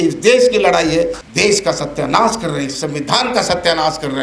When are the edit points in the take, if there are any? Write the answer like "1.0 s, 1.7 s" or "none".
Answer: 1.2 s